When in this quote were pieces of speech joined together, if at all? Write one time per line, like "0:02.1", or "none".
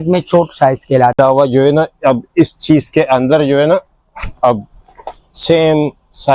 0:01.2

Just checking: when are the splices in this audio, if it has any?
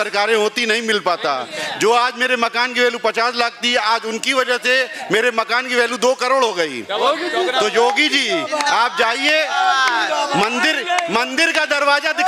none

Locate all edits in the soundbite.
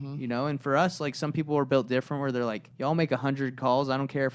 0:02.7

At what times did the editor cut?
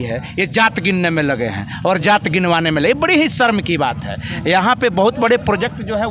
none

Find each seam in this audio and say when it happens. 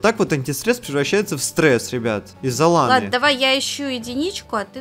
none

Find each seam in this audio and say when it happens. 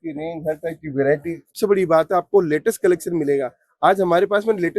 0:01.5

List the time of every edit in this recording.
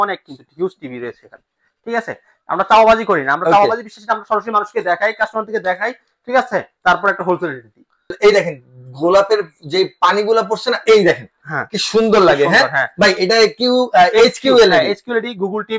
0:08.1

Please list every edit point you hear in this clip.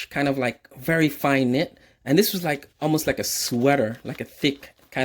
none

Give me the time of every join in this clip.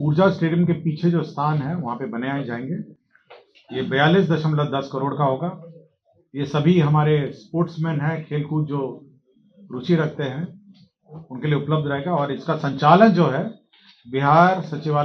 none

